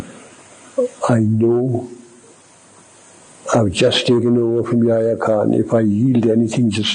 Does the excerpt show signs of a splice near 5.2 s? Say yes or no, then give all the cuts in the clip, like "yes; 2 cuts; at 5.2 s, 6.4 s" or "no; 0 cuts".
no; 0 cuts